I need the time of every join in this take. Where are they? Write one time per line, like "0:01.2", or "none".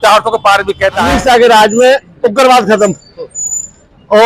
0:01.1